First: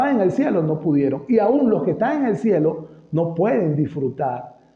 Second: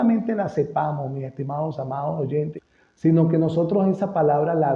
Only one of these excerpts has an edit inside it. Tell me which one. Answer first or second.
second